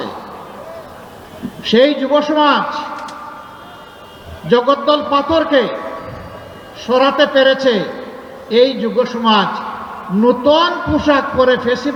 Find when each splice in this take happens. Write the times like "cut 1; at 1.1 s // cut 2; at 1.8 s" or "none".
none